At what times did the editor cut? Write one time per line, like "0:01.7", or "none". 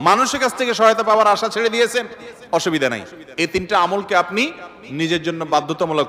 none